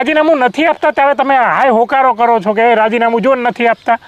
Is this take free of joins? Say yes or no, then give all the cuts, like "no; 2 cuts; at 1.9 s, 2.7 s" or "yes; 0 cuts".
yes; 0 cuts